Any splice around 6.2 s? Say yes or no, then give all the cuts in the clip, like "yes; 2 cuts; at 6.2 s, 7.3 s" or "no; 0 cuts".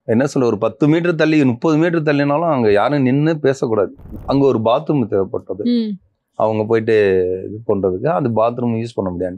no; 1 cut; at 4.0 s